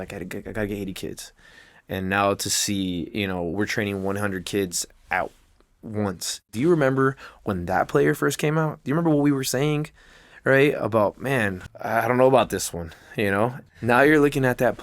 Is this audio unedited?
no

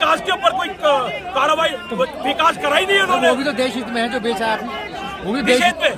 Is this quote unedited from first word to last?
yes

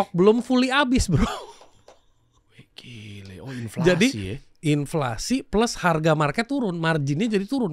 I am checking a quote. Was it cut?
no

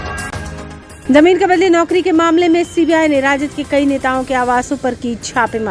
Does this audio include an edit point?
yes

